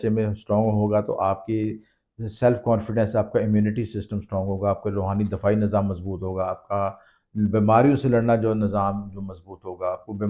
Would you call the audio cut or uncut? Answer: uncut